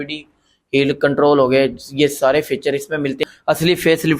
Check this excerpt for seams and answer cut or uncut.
cut